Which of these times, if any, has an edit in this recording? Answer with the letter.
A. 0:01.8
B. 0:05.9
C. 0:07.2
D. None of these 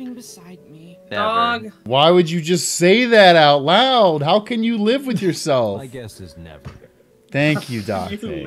A